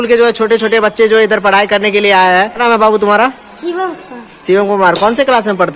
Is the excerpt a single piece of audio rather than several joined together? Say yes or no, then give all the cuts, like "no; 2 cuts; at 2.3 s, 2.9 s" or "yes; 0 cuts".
yes; 0 cuts